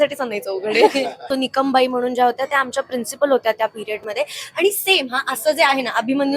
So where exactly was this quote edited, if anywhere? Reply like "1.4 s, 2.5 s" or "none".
1.2 s